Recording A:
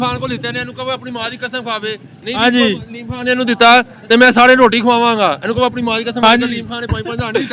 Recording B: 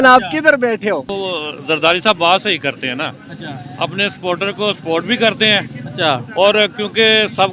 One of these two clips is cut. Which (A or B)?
B